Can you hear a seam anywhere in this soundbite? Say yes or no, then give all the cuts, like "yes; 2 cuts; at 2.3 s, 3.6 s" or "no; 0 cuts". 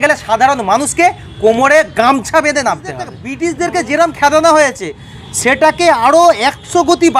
yes; 1 cut; at 3.2 s